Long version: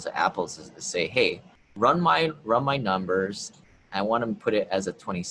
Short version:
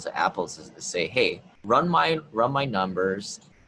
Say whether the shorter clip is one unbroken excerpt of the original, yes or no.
no